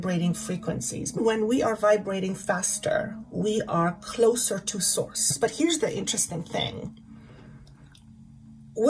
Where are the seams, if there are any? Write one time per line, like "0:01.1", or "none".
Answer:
0:01.1
0:05.3